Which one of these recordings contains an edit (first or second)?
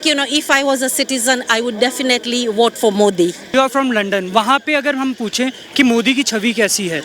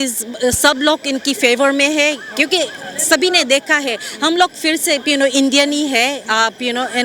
first